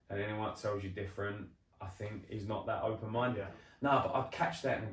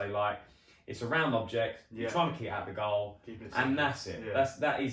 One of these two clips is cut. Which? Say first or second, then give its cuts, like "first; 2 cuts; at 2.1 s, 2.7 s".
first; 1 cut; at 3.5 s